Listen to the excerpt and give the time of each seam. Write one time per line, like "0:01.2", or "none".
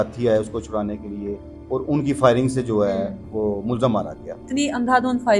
0:04.4